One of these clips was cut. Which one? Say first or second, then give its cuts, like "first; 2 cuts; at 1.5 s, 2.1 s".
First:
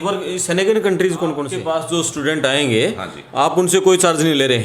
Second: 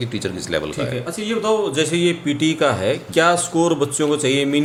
first; 1 cut; at 1.5 s